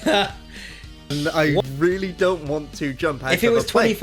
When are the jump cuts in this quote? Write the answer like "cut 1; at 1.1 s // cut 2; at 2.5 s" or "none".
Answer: cut 1; at 1.1 s